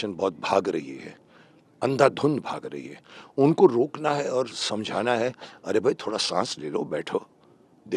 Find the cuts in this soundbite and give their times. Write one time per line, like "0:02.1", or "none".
none